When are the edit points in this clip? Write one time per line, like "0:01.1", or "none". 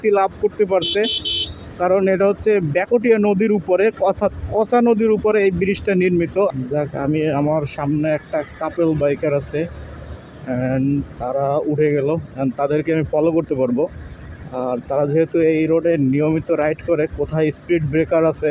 0:06.6